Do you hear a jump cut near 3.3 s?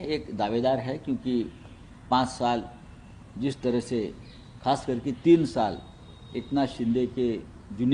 no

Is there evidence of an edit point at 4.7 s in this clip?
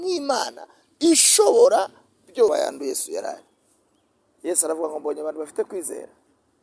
no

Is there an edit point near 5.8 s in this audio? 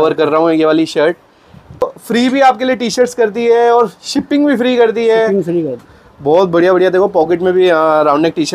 yes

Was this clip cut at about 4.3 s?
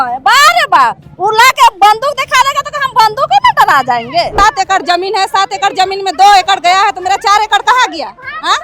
yes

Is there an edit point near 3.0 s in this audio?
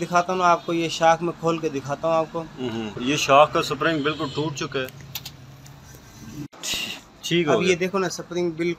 yes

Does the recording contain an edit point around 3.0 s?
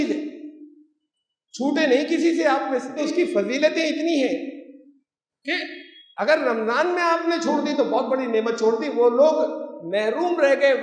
yes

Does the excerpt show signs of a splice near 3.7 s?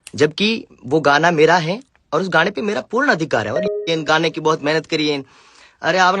yes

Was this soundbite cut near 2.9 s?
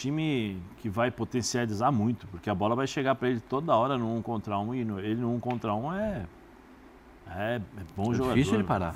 no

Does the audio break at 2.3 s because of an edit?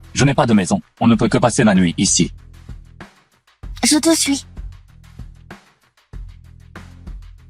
yes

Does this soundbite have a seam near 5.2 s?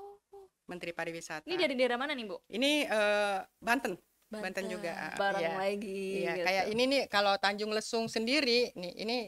yes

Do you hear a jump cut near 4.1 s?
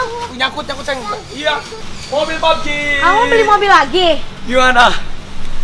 no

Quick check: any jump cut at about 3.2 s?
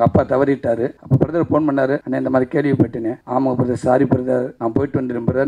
yes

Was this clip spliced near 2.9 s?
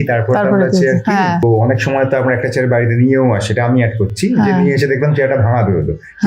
no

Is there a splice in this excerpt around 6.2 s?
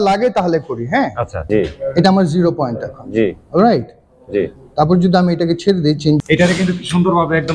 yes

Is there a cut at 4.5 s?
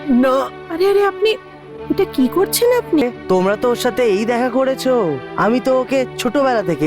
no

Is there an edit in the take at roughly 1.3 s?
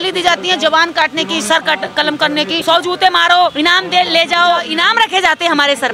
no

